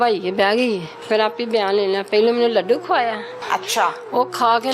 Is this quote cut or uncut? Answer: cut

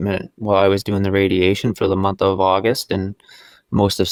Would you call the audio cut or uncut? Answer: uncut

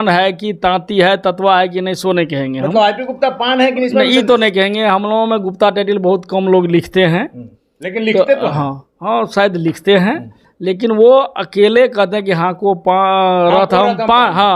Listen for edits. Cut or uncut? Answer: uncut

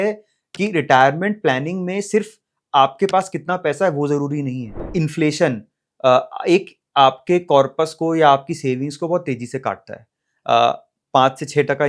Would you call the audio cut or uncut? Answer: cut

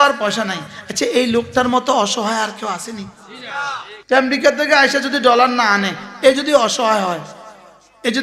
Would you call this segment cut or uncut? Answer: cut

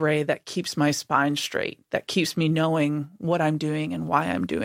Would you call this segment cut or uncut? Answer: uncut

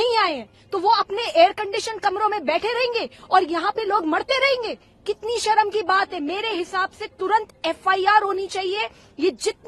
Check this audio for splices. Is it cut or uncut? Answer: uncut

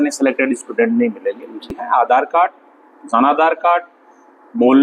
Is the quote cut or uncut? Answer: cut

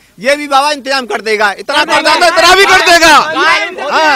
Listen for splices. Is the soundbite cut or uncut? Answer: uncut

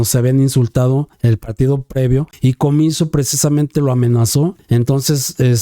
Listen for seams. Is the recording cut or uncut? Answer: cut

